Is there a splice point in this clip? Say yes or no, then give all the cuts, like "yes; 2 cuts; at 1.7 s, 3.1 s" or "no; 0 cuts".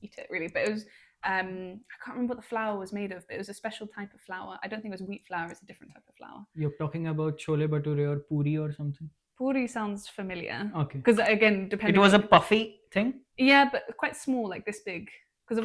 no; 0 cuts